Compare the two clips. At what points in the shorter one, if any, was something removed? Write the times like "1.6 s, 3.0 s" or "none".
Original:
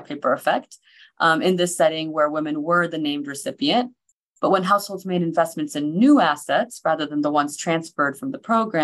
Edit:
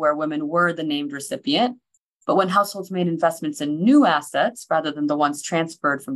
none